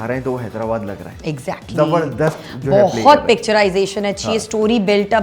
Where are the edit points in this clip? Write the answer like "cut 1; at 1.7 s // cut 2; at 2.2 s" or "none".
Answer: none